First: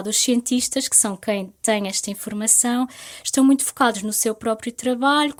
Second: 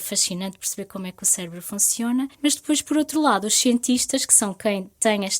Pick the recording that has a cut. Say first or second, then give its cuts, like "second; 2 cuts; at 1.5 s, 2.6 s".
second; 1 cut; at 2.3 s